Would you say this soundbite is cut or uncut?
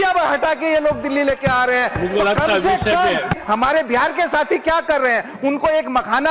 cut